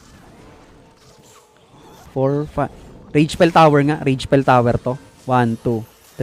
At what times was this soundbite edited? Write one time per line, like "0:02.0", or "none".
0:02.0